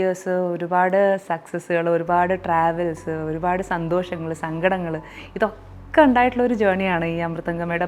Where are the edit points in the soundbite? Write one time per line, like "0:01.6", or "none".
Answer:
none